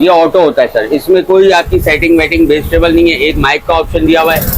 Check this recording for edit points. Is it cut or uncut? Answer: uncut